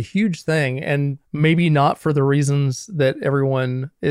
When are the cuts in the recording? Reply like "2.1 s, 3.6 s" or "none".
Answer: 1.2 s